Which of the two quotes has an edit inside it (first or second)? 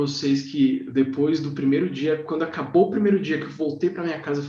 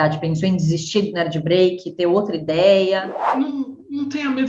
second